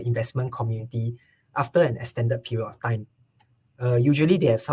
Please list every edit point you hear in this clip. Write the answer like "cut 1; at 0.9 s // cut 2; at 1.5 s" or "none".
none